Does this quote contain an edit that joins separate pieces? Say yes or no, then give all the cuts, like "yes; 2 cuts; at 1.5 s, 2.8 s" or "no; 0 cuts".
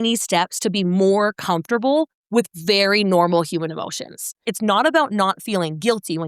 yes; 1 cut; at 4.4 s